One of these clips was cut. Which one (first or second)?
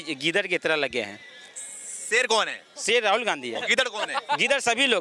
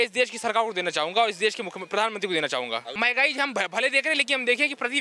second